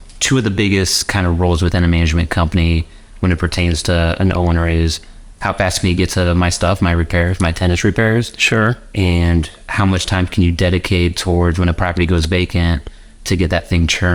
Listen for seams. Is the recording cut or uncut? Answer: uncut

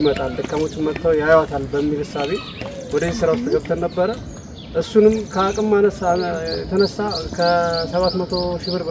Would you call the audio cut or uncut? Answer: uncut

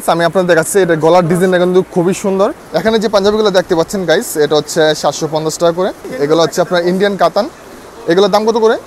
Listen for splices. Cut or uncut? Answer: cut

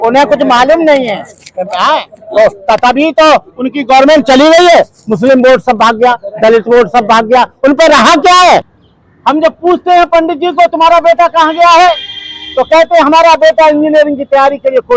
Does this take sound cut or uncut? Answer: cut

